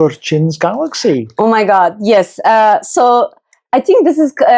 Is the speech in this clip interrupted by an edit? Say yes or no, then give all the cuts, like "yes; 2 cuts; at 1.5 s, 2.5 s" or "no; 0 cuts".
no; 0 cuts